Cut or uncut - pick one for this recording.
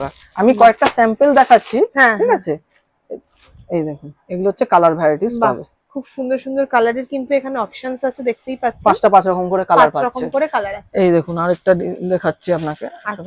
uncut